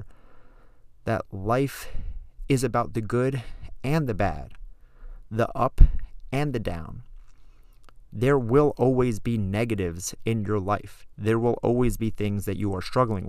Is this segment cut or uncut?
uncut